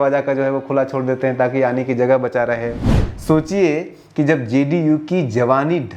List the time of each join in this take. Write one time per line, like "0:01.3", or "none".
0:03.0